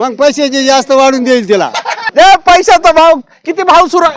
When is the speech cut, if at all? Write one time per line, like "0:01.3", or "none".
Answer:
0:02.0